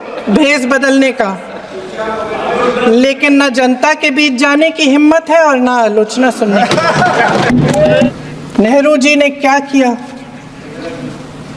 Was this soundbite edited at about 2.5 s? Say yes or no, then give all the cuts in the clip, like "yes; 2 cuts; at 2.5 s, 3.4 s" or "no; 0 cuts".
no; 1 cut; at 8.1 s